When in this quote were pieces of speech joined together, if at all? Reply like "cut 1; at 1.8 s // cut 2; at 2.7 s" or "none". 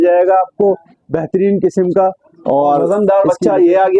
cut 1; at 2.9 s